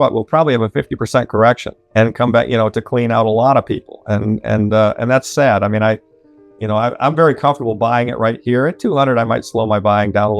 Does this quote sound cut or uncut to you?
cut